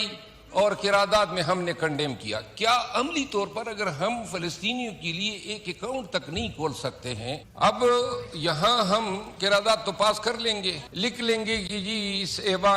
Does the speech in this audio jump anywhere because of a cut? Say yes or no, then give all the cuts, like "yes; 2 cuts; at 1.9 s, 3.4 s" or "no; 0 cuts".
yes; 2 cuts; at 7.5 s, 10.8 s